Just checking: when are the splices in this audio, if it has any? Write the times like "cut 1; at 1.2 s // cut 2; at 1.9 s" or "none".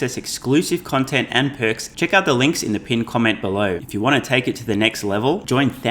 cut 1; at 1.9 s // cut 2; at 3.8 s